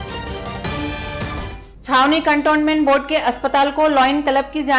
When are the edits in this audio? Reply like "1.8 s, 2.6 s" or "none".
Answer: none